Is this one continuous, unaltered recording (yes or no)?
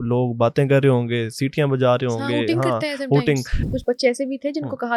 no